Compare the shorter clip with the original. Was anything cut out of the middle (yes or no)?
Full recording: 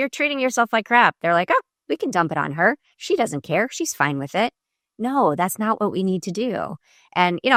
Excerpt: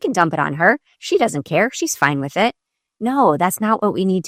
no